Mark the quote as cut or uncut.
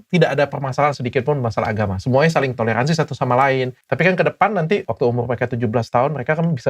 cut